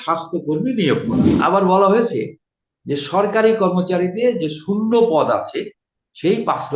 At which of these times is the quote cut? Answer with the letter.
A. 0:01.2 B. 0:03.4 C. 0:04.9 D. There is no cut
A